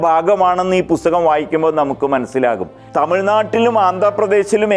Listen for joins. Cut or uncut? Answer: cut